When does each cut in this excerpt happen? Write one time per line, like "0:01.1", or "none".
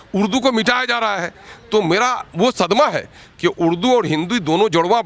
none